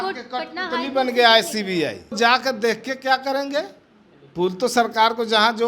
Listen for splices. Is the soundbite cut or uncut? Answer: cut